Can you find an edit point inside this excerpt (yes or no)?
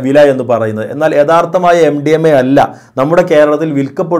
no